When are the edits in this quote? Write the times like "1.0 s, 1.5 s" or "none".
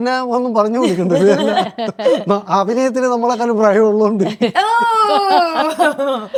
none

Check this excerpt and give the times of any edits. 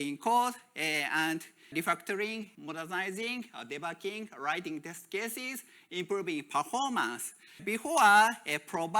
1.7 s, 2.5 s, 7.6 s

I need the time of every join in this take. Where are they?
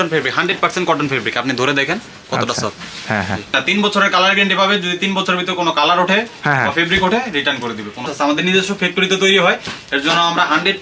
3.6 s, 8.1 s

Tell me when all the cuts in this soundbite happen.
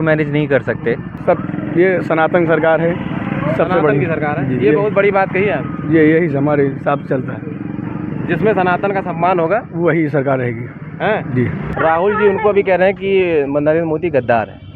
1.1 s, 11.6 s

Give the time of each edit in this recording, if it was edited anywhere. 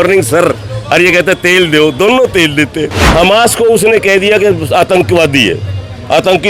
3.0 s

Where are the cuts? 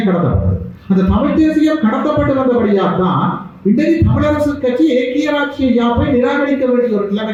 none

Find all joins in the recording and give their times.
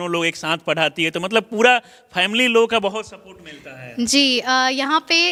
none

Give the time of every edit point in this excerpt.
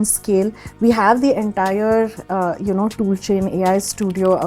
none

